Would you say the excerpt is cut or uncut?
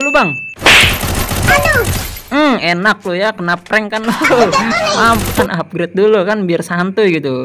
cut